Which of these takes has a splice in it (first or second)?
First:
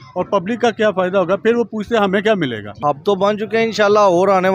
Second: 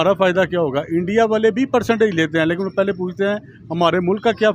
first